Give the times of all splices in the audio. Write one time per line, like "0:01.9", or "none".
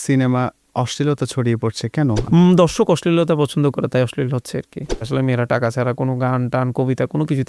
0:02.2
0:05.1